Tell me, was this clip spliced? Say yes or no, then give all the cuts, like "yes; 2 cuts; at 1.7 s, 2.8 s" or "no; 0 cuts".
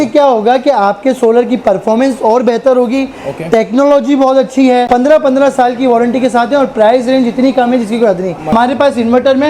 yes; 2 cuts; at 4.9 s, 8.5 s